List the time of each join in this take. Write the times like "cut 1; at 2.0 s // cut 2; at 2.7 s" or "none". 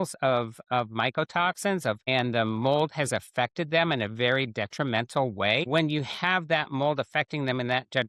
cut 1; at 2.0 s // cut 2; at 5.7 s